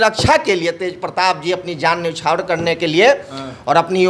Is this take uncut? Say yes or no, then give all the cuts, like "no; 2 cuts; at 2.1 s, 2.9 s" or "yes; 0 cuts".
yes; 0 cuts